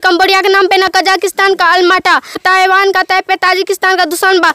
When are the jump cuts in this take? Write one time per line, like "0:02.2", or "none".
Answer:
0:02.4